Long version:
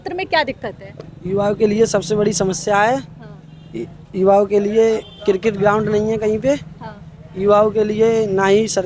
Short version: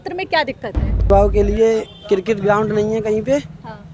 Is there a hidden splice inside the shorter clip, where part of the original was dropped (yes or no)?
yes